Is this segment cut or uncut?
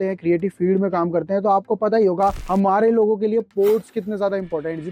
uncut